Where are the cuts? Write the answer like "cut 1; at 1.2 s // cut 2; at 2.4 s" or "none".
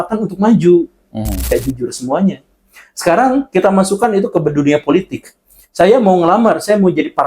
cut 1; at 1.5 s